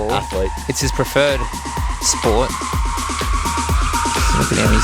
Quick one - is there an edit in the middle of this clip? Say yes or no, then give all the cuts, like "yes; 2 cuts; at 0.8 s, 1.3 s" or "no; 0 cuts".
no; 0 cuts